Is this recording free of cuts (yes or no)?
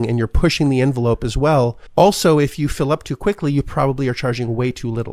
no